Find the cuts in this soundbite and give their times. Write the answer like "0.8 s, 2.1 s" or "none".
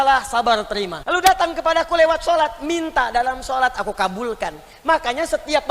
1.0 s